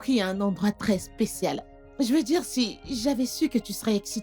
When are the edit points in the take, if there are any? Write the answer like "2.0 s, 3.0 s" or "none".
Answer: none